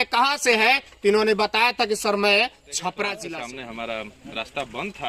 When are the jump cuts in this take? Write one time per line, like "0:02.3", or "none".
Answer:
0:03.2